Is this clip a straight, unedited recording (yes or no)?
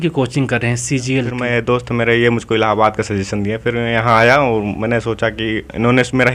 no